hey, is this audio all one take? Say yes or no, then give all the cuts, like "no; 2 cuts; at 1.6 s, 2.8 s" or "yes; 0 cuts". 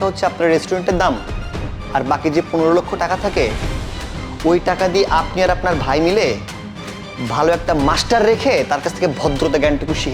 yes; 0 cuts